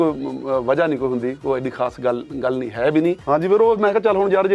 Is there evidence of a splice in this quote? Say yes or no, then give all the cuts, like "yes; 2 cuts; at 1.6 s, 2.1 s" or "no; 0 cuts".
yes; 1 cut; at 3.2 s